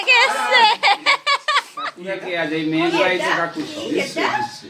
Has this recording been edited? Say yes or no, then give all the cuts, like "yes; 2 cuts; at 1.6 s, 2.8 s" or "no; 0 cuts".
no; 0 cuts